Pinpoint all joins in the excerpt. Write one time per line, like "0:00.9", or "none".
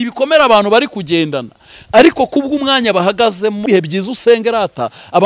0:03.6